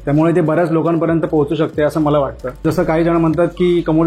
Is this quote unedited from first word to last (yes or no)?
no